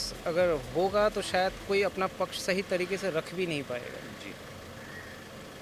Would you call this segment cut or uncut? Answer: uncut